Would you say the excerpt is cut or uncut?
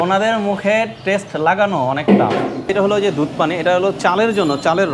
cut